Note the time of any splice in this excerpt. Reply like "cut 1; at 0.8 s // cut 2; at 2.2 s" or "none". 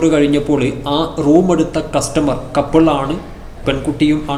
none

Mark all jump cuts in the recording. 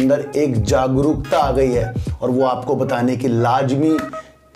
none

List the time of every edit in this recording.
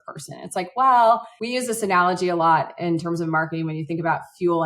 cut 1; at 1.3 s

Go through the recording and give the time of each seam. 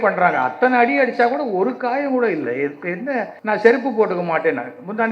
cut 1; at 3.3 s

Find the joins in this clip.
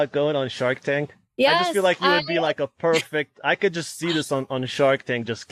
cut 1; at 1.2 s

